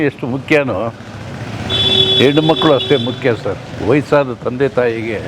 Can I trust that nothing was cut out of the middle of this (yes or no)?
yes